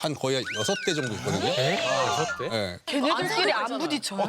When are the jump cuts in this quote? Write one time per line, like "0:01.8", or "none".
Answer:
0:02.8